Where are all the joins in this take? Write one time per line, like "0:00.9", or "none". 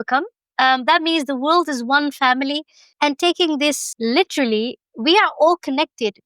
0:03.8